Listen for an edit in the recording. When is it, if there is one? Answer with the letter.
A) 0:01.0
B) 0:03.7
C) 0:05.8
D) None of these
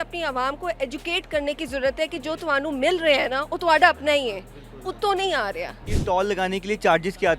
C